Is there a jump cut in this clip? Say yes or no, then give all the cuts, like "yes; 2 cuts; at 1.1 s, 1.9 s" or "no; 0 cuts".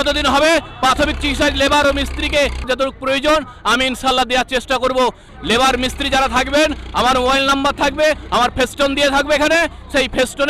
yes; 2 cuts; at 2.7 s, 5.3 s